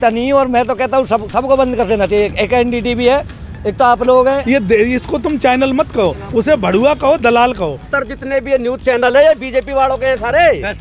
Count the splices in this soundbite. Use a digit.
2